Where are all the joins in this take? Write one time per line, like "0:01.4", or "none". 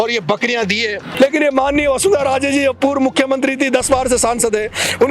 0:01.0